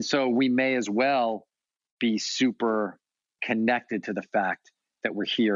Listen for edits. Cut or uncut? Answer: cut